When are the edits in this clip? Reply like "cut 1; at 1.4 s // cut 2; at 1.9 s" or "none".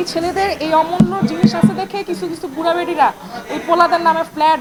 none